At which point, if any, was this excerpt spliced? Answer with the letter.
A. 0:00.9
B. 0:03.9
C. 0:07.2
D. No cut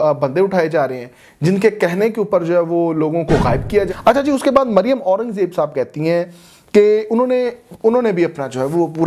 B